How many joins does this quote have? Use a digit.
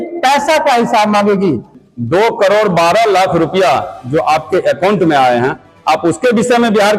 1